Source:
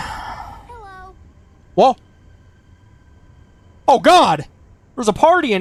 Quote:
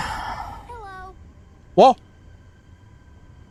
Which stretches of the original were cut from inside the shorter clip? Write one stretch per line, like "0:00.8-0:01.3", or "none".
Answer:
none